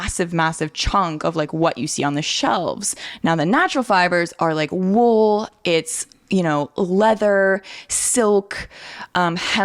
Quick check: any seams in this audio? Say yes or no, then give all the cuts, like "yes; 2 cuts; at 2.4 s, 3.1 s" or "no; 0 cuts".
yes; 1 cut; at 3.0 s